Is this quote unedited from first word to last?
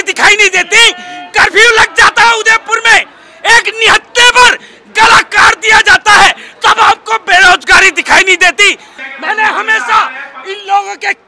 no; 1 cut; at 8.9 s

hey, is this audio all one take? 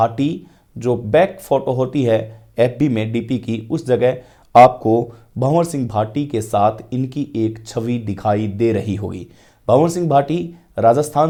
yes; 0 cuts

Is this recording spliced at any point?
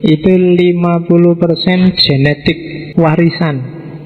yes; 1 cut; at 2.8 s

